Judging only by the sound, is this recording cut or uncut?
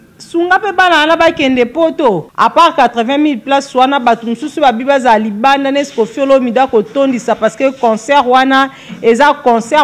cut